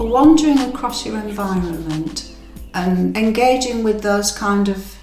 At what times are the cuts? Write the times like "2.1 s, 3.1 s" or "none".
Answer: 3.1 s